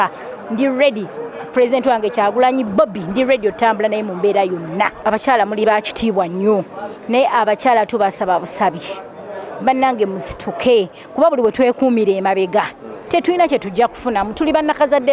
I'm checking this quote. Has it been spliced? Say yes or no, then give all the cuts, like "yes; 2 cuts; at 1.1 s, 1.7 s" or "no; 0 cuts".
yes; 1 cut; at 5.0 s